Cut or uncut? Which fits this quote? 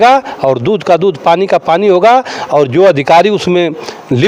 uncut